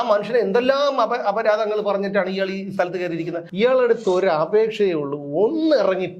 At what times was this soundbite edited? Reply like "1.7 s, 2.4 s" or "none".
3.4 s